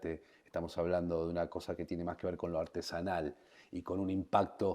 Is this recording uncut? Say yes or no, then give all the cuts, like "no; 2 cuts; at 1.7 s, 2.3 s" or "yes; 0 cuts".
yes; 0 cuts